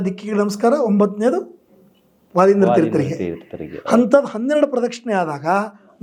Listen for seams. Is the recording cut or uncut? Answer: uncut